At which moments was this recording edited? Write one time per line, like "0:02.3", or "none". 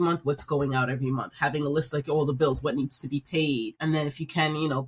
0:03.7